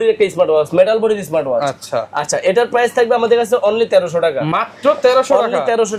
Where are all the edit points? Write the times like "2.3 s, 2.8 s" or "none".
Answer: none